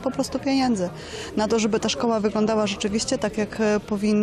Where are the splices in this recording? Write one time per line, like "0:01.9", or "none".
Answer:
none

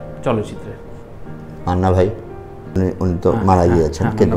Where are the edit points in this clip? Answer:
0:02.8

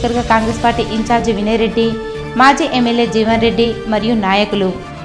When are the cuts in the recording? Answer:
none

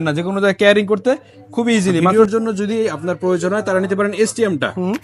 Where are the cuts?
0:02.1

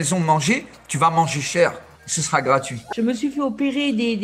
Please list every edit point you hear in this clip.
0:02.8

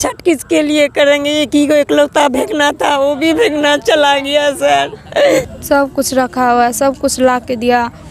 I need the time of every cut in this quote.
0:05.1

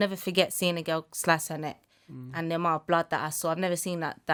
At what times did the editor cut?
none

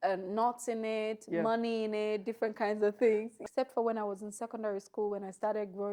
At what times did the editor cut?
0:03.3

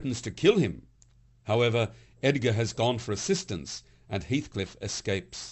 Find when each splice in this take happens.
none

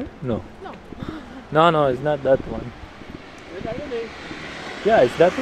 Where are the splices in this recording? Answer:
none

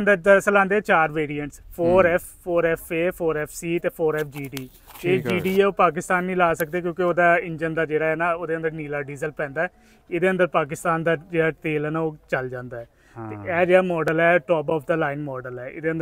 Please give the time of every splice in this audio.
none

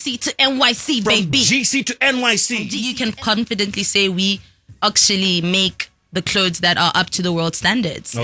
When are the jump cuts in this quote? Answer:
0:02.8

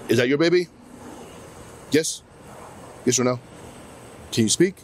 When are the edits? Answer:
none

